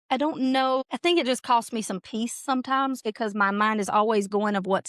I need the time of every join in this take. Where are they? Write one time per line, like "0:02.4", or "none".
0:00.9